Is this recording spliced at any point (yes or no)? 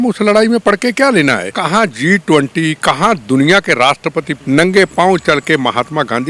yes